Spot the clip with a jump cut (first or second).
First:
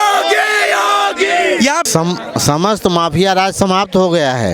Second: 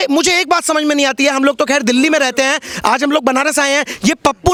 first